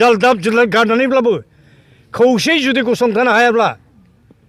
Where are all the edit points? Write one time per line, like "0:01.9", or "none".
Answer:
none